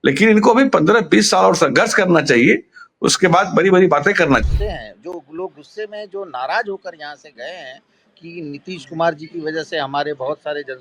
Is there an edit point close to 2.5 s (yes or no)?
no